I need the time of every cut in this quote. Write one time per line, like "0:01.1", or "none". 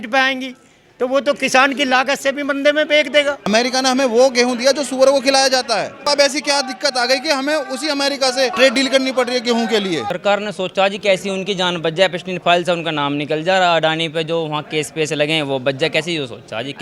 0:03.5
0:06.1
0:08.5
0:10.1

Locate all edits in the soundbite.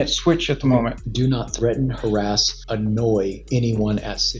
0:01.0
0:02.5
0:03.4

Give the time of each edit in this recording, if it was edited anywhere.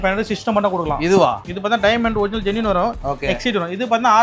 0:01.4

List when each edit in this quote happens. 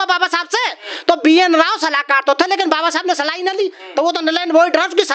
none

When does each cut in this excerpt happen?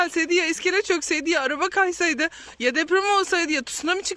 none

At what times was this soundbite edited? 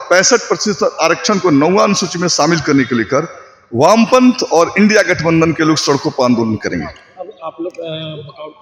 none

